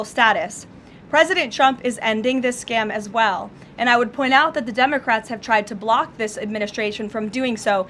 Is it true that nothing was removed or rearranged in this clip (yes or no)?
yes